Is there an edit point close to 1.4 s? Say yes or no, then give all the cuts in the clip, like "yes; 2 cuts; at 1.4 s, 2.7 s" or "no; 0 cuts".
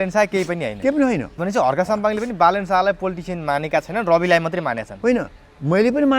yes; 1 cut; at 1.4 s